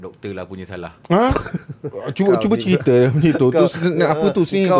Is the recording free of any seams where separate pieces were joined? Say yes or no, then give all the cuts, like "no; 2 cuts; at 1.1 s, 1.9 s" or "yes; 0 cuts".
yes; 0 cuts